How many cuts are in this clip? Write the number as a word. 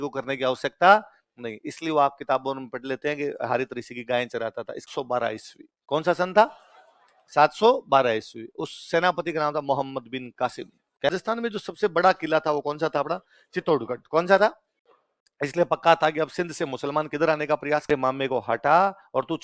three